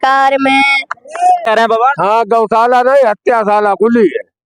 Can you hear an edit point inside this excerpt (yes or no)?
yes